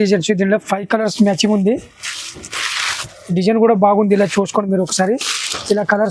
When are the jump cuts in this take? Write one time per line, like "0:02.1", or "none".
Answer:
none